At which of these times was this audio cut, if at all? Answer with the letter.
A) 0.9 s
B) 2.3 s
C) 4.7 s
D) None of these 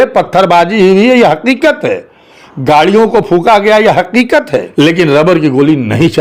C